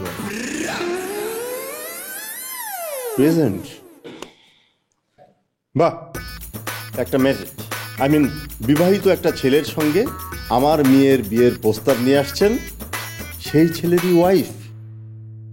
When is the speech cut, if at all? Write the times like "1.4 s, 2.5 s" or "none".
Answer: none